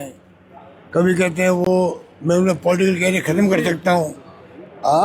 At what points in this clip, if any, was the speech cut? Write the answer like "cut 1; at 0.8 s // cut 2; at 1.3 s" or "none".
none